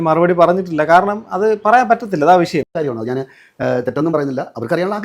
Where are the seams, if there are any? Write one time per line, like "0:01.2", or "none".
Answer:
0:02.7